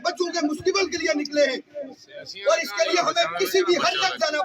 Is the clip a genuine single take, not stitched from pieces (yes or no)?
yes